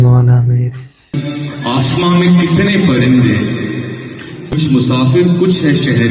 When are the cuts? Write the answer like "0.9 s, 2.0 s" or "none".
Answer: 1.1 s, 4.5 s